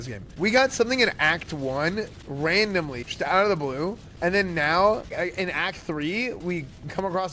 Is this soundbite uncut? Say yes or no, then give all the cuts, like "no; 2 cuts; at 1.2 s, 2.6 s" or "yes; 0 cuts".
no; 3 cuts; at 3.0 s, 5.1 s, 6.4 s